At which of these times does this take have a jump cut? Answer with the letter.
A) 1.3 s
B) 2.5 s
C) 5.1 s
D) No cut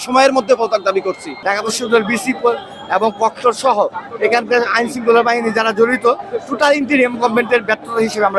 A